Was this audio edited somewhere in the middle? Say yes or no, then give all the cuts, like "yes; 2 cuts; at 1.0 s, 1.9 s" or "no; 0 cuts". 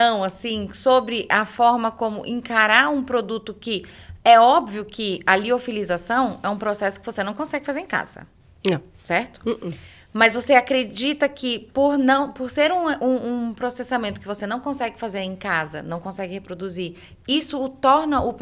no; 0 cuts